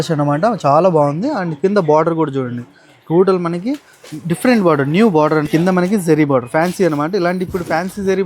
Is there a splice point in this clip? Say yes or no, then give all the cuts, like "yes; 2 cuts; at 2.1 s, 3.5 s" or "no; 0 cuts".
yes; 1 cut; at 5.5 s